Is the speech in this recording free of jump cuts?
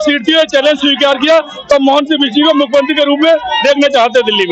yes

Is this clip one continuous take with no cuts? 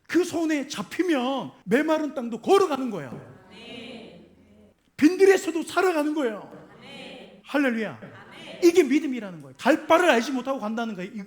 no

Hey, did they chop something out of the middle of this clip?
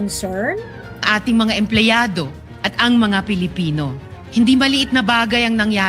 no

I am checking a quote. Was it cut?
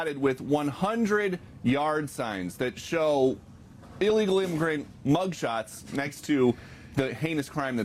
no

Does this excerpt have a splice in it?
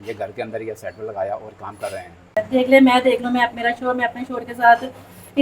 yes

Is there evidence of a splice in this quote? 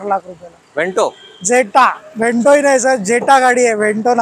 no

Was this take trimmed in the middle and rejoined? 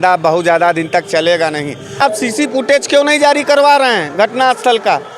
yes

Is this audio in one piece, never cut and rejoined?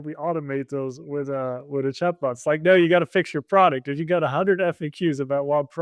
yes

